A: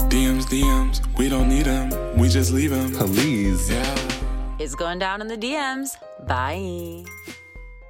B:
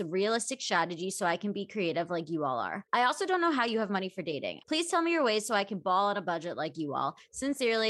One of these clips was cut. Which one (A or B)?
B